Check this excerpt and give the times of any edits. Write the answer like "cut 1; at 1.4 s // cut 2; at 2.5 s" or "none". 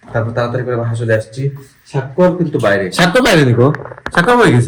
none